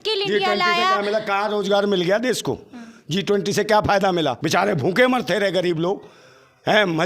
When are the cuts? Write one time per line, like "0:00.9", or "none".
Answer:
0:04.4